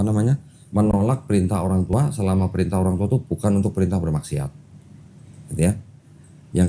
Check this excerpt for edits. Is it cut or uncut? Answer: uncut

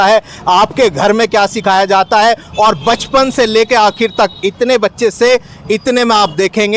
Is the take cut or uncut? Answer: uncut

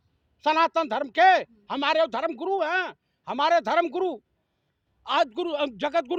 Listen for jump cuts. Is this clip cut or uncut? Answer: uncut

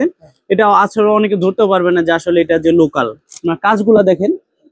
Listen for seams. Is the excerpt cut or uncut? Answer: uncut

